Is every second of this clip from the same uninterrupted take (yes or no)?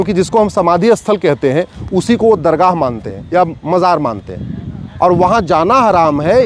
yes